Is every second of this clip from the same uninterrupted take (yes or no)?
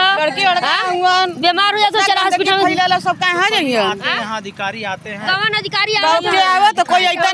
yes